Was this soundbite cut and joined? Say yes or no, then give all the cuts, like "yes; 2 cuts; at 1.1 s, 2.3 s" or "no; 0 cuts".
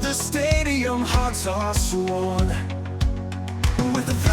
no; 0 cuts